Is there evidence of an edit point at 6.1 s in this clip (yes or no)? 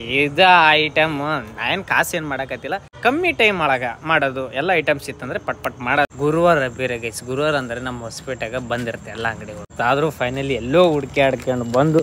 yes